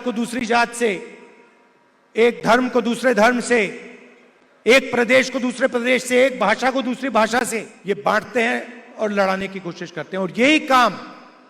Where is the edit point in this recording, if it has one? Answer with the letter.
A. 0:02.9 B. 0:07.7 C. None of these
B